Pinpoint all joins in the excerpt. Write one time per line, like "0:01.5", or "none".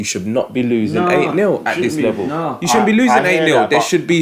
none